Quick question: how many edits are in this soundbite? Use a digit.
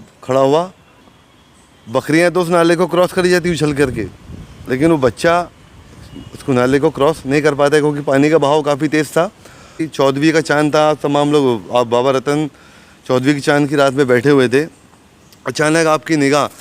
2